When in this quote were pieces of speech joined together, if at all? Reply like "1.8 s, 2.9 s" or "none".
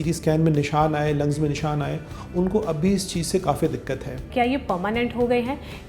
4.3 s